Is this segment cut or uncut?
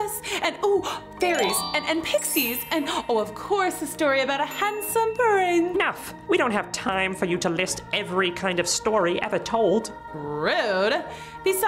cut